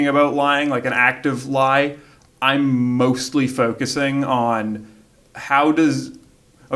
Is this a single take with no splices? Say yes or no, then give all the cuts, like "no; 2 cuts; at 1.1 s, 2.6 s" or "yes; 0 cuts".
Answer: yes; 0 cuts